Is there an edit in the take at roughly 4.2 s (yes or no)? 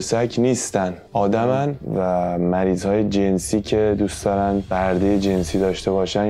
no